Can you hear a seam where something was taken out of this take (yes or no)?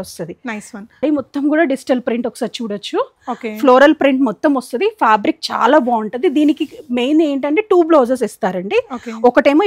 yes